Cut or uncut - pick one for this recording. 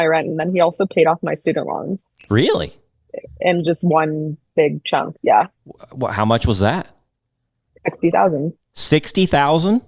uncut